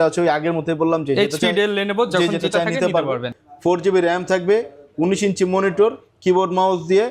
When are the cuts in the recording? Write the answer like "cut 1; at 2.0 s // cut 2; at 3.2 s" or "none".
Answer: cut 1; at 3.3 s